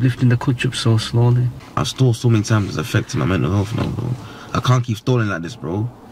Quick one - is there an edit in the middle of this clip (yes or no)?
no